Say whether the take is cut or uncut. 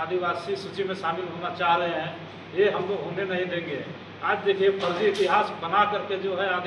uncut